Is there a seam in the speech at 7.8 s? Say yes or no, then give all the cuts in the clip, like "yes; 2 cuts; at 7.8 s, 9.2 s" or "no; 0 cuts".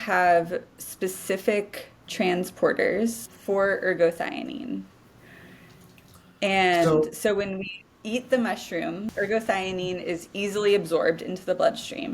no; 2 cuts; at 3.3 s, 9.1 s